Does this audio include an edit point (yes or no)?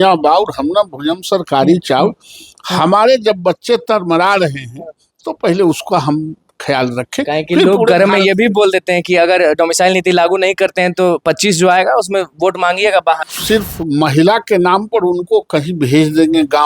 yes